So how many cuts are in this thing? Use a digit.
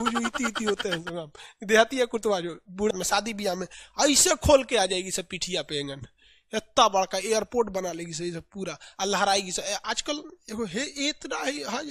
1